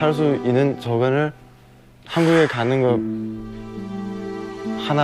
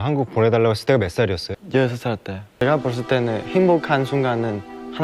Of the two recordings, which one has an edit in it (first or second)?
second